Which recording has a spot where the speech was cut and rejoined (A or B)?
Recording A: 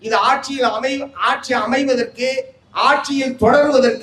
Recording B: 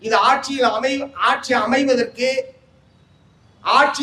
A